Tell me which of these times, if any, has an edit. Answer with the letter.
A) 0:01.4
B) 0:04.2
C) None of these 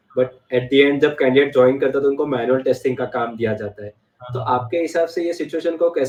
C